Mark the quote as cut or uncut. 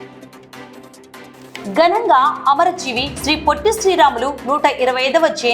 cut